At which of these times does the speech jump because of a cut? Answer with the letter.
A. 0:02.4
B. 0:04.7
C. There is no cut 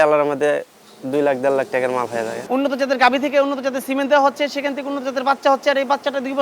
A